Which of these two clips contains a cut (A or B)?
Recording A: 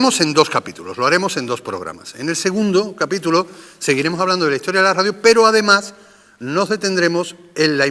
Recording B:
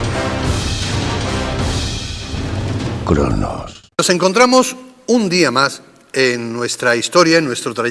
A